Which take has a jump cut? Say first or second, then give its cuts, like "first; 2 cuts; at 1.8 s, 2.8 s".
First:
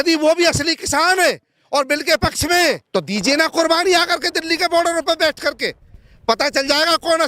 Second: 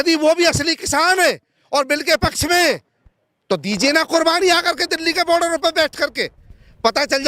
first; 1 cut; at 2.8 s